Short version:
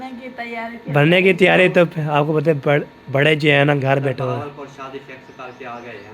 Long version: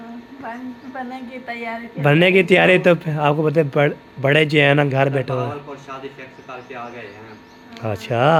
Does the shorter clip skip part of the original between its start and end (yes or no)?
no